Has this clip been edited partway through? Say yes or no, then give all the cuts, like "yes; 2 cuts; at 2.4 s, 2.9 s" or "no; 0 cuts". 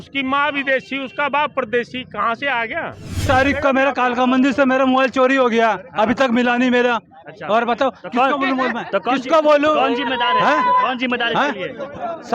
yes; 1 cut; at 3.3 s